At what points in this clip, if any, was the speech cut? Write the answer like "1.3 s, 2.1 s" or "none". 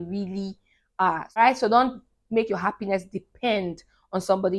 1.4 s